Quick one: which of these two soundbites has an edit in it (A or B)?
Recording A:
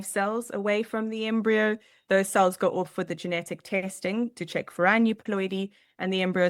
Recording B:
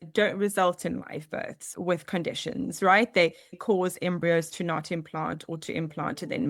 B